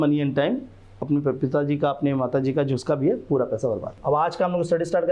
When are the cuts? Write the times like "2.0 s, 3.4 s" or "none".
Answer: 4.0 s